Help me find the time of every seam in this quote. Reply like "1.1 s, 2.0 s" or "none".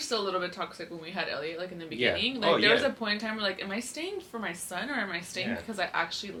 none